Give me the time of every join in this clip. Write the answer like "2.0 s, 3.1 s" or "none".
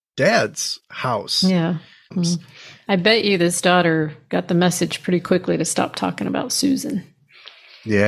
2.2 s